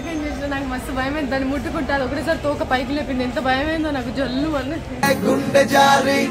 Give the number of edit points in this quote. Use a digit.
0